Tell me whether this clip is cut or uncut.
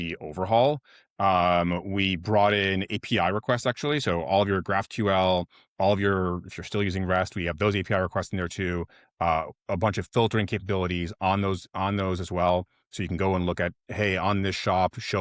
uncut